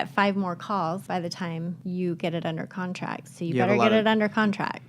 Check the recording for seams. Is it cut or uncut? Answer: cut